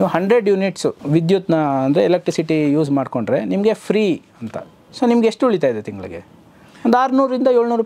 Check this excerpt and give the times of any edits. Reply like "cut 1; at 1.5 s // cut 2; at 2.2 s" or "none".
cut 1; at 1.0 s